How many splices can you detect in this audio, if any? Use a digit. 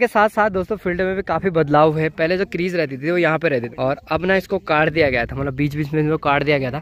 0